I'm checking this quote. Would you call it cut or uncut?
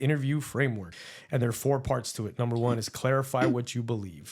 cut